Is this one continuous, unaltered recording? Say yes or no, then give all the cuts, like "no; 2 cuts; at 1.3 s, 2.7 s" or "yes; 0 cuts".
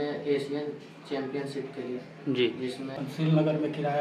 no; 1 cut; at 2.9 s